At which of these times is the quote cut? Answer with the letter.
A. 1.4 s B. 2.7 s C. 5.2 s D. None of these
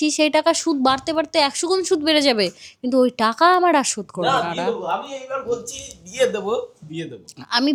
D